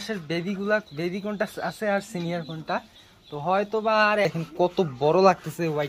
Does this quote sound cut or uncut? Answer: cut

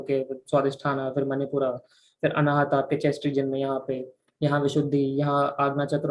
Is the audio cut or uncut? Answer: uncut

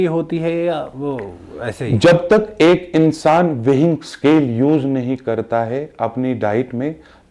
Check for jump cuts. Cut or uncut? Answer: uncut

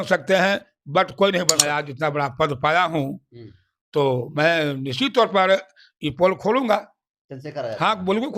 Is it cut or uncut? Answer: cut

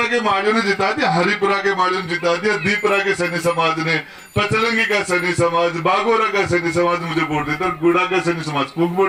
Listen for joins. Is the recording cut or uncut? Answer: uncut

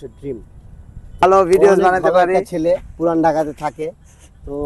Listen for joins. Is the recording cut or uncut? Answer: cut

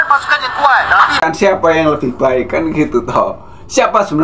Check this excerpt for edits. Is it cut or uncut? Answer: cut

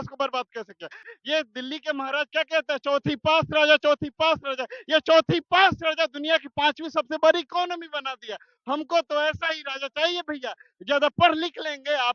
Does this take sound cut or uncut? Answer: cut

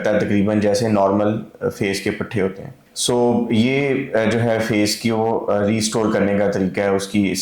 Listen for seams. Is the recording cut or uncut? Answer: uncut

